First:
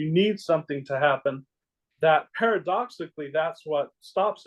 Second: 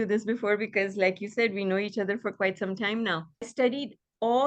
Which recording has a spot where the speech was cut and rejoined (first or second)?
second